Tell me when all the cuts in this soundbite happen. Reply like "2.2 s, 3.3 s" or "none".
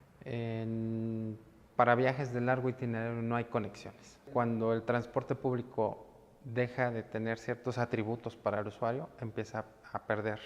4.3 s

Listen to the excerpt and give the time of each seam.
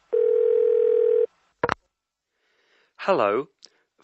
1.1 s

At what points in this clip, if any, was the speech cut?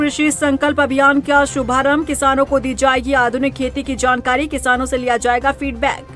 none

